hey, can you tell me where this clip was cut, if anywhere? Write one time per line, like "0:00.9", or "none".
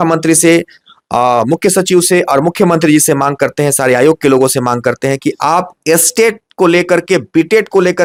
none